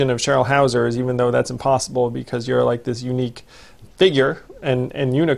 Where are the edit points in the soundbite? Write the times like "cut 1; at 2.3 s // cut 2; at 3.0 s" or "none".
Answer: cut 1; at 3.9 s